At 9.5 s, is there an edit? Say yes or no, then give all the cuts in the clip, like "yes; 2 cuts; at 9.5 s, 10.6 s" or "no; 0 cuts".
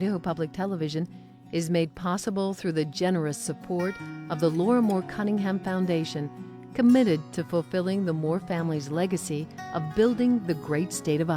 no; 0 cuts